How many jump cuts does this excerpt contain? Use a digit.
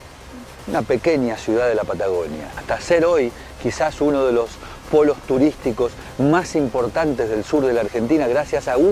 1